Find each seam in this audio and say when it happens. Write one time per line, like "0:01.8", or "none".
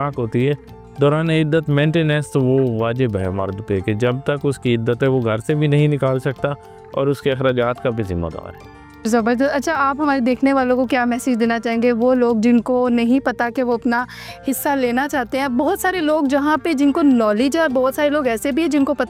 none